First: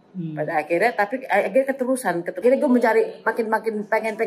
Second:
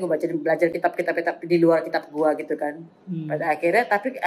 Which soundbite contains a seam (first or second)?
first